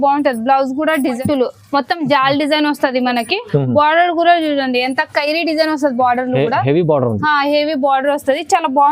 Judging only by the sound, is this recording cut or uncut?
cut